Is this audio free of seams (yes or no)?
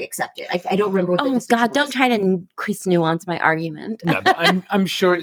yes